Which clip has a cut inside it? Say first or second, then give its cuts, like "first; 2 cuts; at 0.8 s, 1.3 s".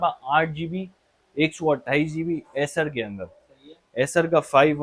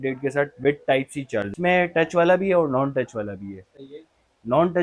second; 1 cut; at 1.5 s